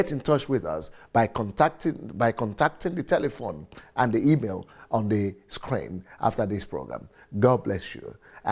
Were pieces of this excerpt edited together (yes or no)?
no